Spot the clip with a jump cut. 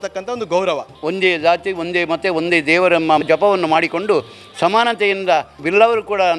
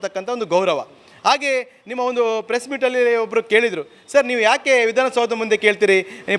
first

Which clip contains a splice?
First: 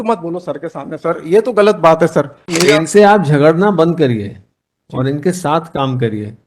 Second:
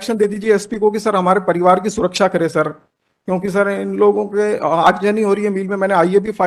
first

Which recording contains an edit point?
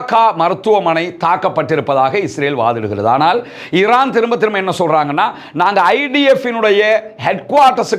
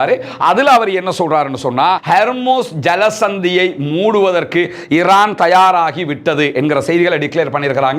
second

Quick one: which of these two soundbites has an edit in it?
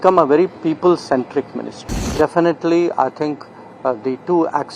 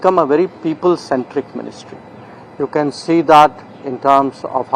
first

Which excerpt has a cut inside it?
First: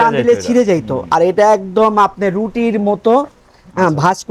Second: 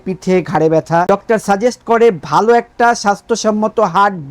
second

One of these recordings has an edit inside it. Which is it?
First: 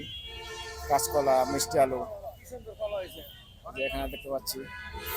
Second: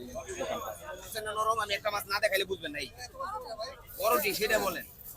second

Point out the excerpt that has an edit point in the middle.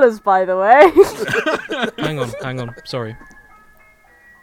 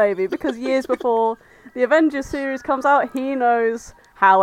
first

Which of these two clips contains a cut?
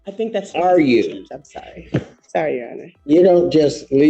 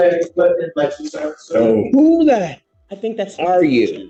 first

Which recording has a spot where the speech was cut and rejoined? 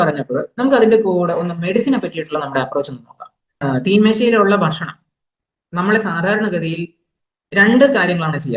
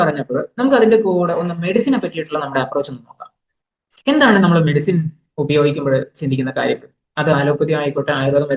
first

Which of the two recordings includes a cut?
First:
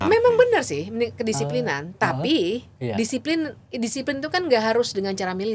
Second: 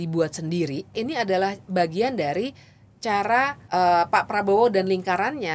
second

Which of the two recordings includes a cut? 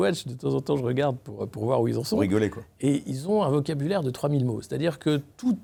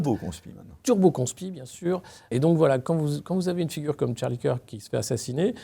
second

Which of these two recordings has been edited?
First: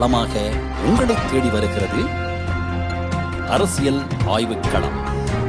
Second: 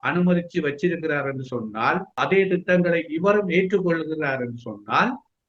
second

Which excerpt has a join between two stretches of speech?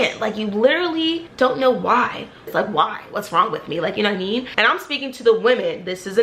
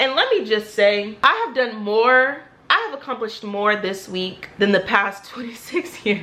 first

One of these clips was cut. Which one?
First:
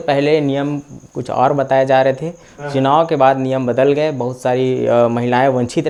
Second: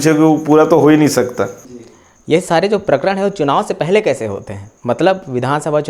second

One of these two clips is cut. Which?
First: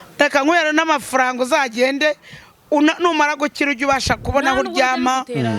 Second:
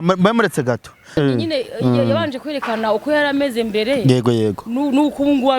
second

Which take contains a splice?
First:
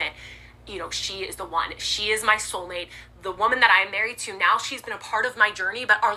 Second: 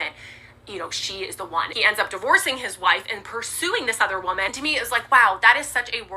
second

